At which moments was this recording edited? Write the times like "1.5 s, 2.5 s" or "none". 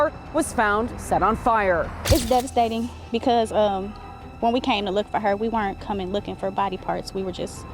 1.9 s